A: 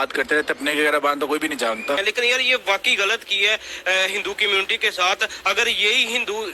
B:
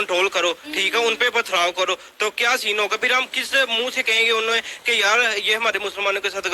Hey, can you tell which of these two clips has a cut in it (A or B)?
A